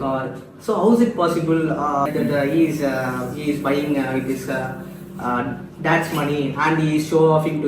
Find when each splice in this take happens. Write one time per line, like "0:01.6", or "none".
0:02.1